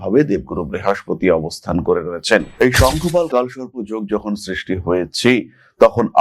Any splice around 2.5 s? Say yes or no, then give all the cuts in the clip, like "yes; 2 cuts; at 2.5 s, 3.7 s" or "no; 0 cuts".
yes; 1 cut; at 2.5 s